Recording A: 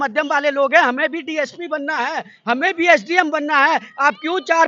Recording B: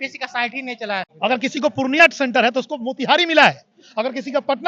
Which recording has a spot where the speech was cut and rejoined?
B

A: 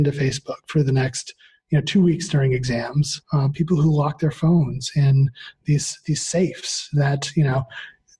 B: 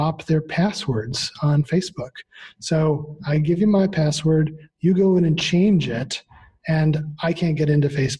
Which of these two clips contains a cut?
A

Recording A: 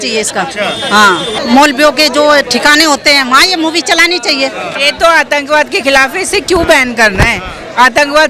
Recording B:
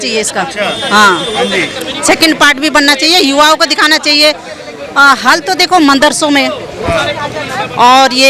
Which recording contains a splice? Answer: A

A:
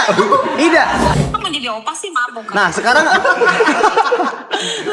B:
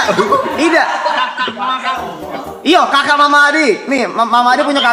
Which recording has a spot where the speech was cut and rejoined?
A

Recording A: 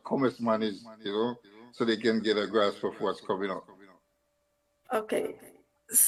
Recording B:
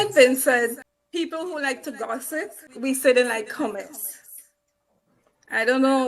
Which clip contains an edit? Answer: B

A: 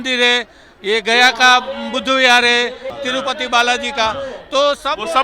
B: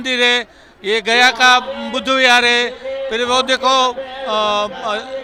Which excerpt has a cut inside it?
A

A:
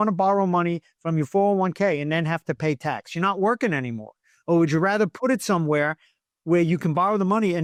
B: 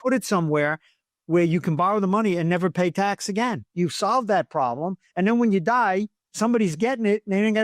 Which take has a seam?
B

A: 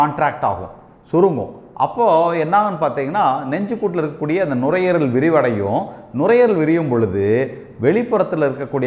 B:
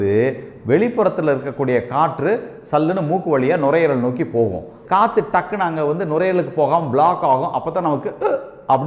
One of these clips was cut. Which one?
B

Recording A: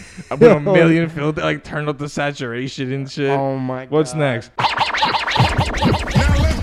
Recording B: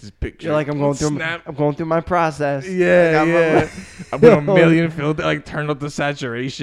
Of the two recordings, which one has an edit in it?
A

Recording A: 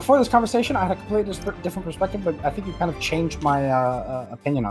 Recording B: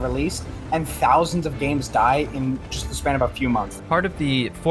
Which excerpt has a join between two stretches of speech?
B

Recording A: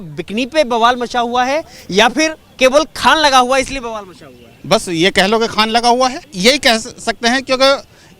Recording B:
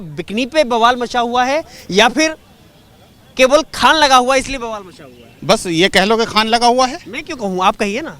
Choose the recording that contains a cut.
A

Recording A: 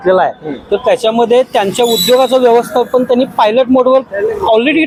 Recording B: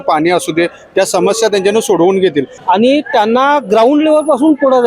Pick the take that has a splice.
B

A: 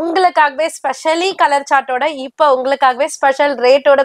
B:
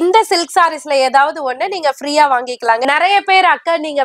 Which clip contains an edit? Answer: B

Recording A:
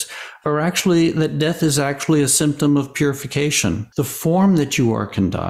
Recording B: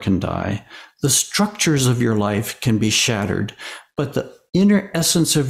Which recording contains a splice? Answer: A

